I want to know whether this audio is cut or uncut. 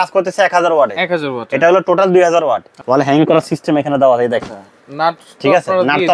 cut